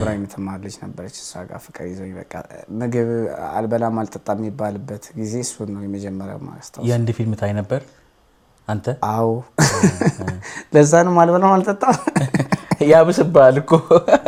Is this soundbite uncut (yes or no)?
yes